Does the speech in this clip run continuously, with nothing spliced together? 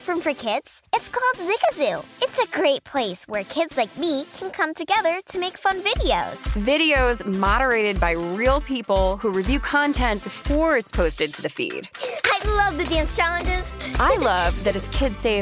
no; 1 cut; at 6.4 s

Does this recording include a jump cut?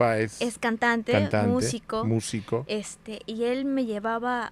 no; 0 cuts

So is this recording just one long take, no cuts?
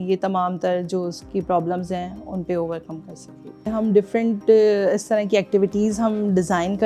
no; 1 cut; at 3.7 s

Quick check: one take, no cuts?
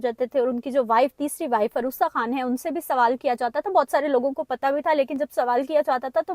yes; 0 cuts

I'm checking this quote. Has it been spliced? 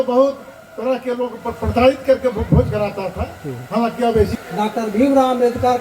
yes; 1 cut; at 4.3 s

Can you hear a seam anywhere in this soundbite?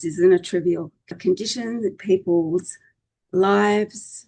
yes; 1 cut; at 1.1 s

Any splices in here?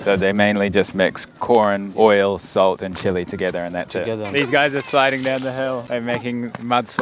yes; 2 cuts; at 4.3 s, 5.8 s

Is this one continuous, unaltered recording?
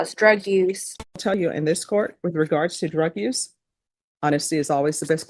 no; 1 cut; at 1.3 s

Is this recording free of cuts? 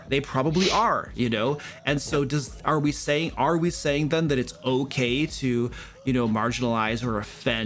yes; 0 cuts

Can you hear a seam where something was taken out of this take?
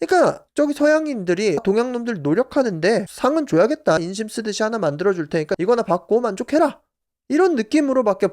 yes; 2 cuts; at 1.6 s, 4.0 s

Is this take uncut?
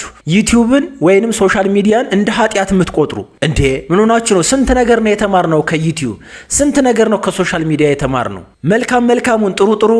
yes; 0 cuts

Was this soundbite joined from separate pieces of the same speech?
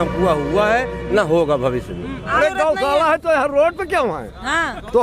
yes; 1 cut; at 2.3 s

